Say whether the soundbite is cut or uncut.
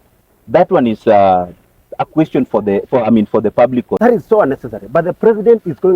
cut